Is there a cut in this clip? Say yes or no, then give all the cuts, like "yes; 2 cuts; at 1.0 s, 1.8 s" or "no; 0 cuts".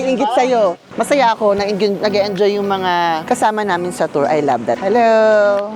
yes; 2 cuts; at 0.8 s, 4.8 s